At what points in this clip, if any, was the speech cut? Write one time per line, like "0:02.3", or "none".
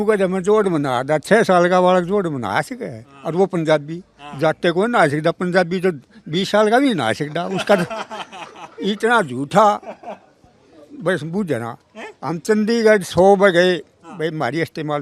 none